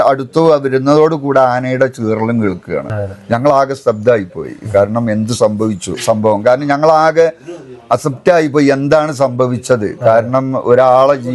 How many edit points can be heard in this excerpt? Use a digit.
2